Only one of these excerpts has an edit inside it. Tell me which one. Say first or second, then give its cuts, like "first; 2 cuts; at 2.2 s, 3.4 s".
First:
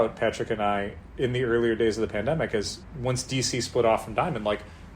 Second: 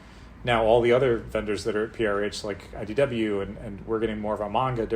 first; 2 cuts; at 1.0 s, 2.8 s